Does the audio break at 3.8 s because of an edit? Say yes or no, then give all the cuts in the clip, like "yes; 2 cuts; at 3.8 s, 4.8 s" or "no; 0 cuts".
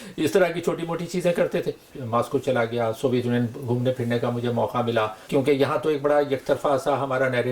no; 2 cuts; at 1.9 s, 5.2 s